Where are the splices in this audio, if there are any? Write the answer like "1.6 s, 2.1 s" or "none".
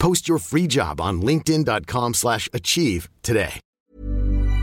3.6 s